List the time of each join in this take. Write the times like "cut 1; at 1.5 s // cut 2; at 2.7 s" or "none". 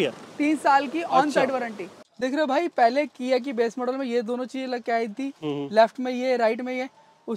cut 1; at 1.9 s